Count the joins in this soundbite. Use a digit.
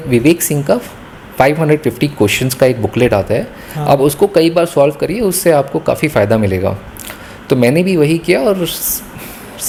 0